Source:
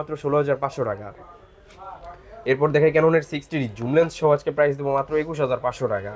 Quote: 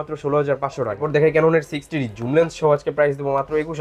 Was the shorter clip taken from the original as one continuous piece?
no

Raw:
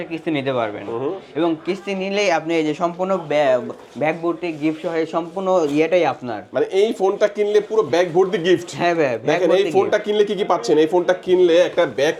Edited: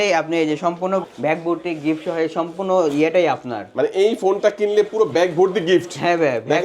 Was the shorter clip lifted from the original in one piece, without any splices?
no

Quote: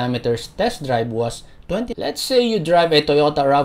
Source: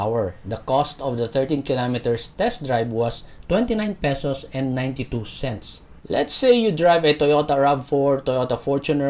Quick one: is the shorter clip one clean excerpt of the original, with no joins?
no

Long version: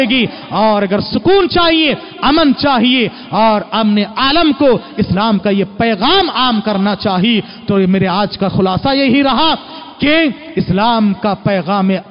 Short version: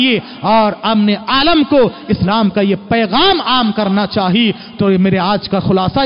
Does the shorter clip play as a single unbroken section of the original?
yes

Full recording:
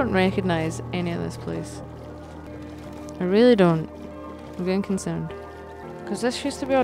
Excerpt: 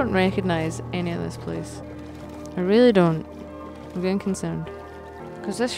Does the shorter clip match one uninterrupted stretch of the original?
no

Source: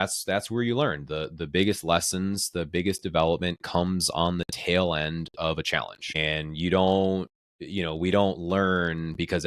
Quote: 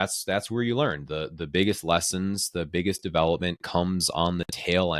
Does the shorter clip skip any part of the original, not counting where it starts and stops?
no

